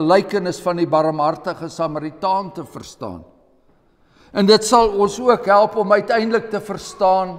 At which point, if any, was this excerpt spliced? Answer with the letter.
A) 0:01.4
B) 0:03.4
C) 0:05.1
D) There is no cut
D